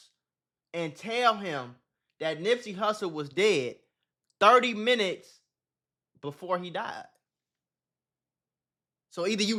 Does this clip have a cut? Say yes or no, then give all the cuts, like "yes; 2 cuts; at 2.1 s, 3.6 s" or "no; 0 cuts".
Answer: no; 0 cuts